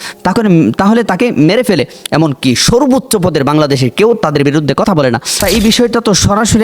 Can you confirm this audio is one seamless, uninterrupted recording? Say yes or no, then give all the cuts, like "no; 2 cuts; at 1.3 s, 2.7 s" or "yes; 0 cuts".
no; 1 cut; at 5.4 s